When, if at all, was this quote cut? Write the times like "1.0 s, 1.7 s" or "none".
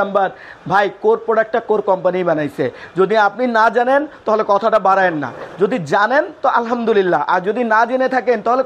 none